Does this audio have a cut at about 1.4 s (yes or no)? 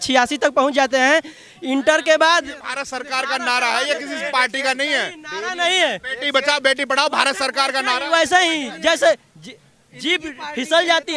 no